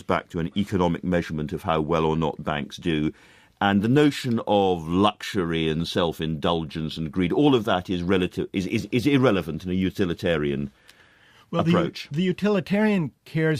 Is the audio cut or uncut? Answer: uncut